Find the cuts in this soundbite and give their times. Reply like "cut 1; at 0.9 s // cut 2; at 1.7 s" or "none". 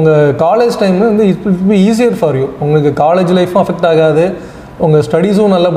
none

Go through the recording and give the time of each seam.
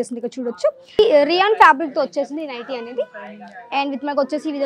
cut 1; at 1.0 s

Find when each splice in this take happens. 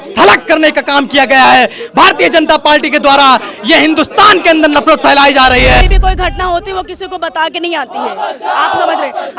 cut 1; at 5.8 s

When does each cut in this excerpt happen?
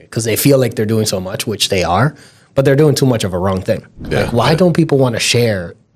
cut 1; at 4.3 s

